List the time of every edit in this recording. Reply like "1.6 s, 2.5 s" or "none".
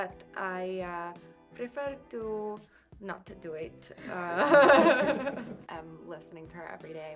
5.6 s